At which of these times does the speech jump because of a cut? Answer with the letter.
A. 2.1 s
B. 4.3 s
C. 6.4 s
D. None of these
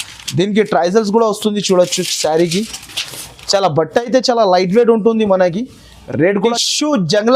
C